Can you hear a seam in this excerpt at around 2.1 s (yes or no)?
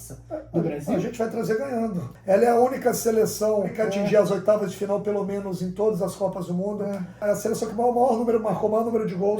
yes